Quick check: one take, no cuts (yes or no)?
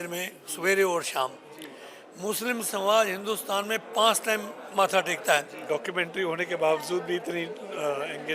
no